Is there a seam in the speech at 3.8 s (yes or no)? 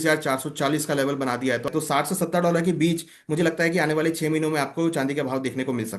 no